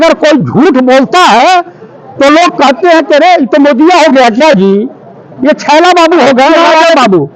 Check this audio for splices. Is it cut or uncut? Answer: uncut